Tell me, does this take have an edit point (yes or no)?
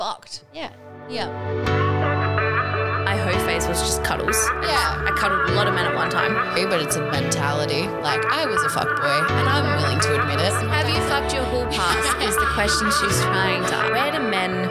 yes